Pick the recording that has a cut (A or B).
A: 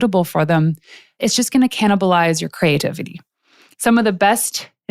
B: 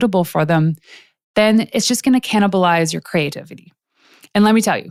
A